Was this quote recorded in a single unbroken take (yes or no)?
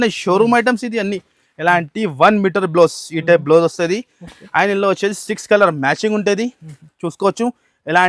yes